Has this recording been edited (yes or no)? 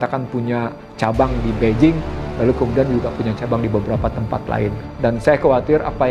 yes